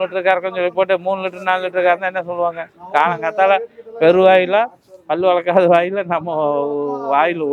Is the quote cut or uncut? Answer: uncut